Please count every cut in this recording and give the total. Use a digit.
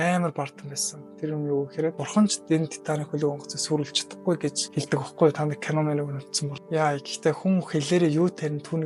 0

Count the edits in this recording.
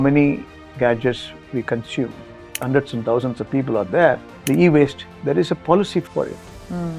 3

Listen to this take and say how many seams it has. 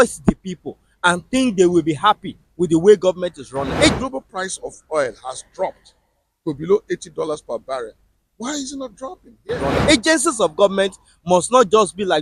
2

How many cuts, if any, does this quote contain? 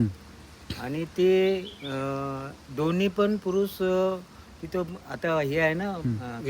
0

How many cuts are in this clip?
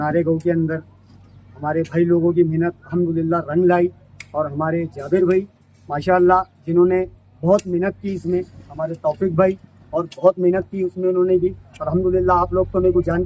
0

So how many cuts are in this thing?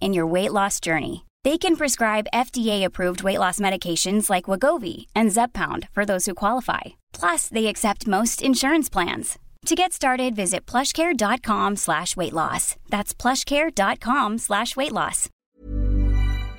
1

